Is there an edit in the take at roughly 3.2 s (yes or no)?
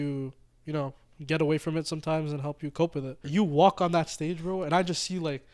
yes